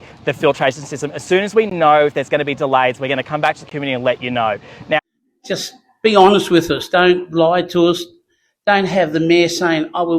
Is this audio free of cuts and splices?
no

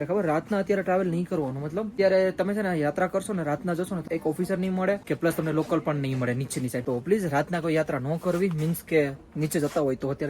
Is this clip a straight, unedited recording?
no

